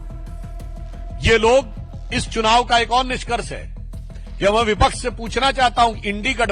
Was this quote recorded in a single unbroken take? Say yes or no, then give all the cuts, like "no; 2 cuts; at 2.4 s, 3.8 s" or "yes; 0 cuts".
no; 1 cut; at 1.2 s